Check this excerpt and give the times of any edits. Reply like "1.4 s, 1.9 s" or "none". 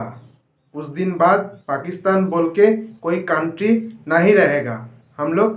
none